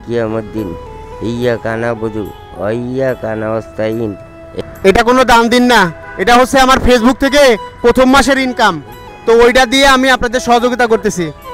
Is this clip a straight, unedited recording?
no; 1 cut; at 4.5 s

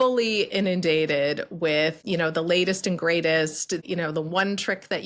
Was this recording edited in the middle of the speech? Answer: yes; 2 cuts; at 2.0 s, 3.8 s

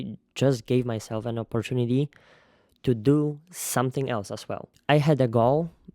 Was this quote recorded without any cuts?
no; 1 cut; at 4.7 s

